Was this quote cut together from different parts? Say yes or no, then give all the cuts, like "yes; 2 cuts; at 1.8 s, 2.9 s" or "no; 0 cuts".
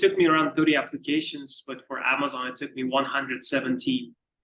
no; 0 cuts